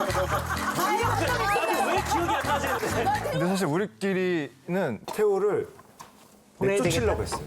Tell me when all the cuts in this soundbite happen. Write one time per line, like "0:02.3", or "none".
0:03.3